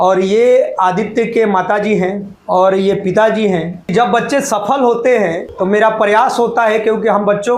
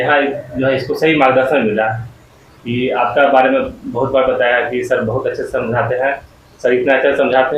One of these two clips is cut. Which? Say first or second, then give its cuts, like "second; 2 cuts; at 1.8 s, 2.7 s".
first; 3 cuts; at 2.3 s, 3.9 s, 5.5 s